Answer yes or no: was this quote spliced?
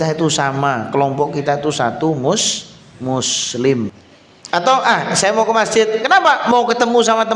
yes